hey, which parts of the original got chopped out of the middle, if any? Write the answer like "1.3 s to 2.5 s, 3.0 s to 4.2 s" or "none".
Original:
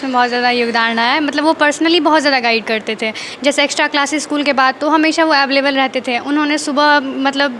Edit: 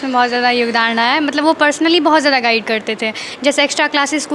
none